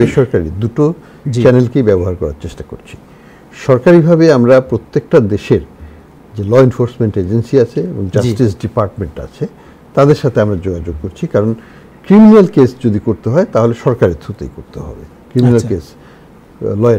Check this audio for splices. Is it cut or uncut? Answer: uncut